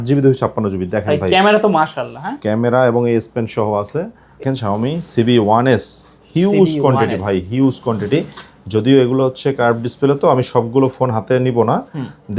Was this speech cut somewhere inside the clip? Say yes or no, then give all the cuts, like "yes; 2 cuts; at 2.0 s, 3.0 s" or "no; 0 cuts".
yes; 1 cut; at 4.4 s